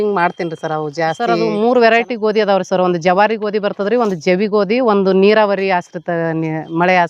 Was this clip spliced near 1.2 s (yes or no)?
yes